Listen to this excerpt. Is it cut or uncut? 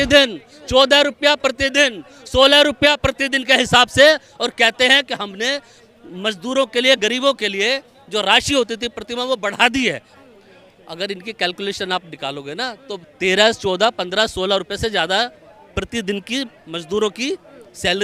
uncut